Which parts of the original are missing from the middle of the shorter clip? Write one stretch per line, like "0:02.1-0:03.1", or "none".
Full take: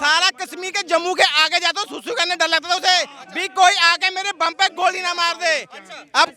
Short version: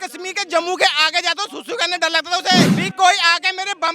0:03.2-0:03.4